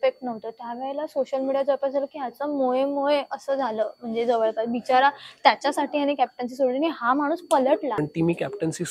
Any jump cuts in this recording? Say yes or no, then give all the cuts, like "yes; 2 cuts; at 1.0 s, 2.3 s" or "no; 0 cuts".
yes; 1 cut; at 8.0 s